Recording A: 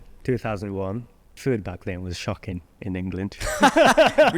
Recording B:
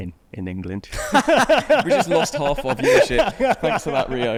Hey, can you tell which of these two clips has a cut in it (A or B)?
A